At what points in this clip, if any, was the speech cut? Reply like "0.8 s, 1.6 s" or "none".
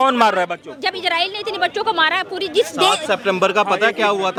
none